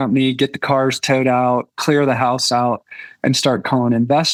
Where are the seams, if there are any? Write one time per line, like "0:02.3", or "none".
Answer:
none